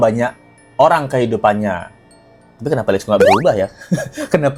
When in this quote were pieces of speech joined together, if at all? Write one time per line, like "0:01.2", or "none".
none